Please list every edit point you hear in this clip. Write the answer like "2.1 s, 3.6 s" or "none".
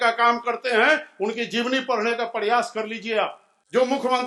none